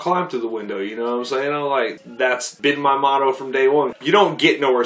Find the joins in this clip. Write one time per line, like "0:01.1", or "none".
0:02.0
0:04.0